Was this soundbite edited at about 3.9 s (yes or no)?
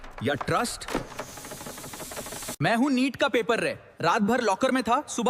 no